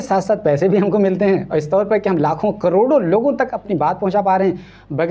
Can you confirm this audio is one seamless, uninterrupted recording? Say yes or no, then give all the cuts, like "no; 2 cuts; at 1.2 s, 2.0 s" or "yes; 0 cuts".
yes; 0 cuts